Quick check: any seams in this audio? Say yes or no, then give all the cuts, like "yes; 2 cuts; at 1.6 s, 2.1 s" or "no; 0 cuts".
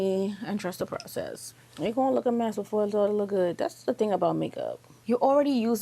yes; 2 cuts; at 1.4 s, 4.9 s